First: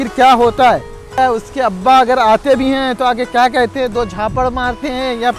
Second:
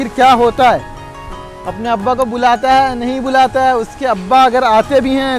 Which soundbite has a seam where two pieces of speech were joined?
first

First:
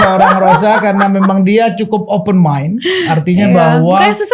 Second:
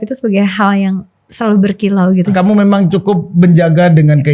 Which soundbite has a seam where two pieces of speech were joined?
second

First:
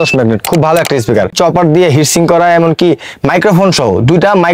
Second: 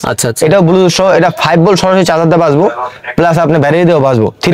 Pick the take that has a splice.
first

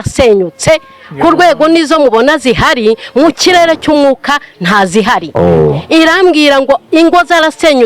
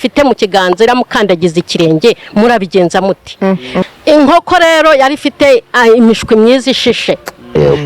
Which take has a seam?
second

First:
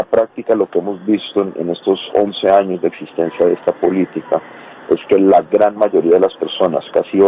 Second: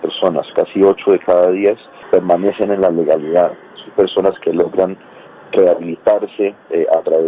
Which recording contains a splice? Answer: second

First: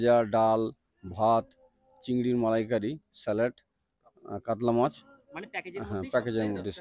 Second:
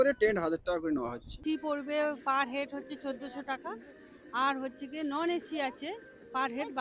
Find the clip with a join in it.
second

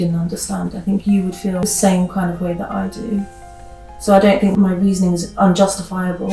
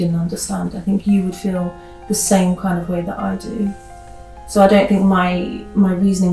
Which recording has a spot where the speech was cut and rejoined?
first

